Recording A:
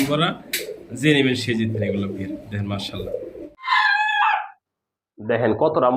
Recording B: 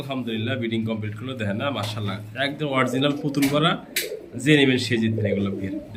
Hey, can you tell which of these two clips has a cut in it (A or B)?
A